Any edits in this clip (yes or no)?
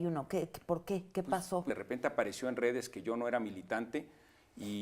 yes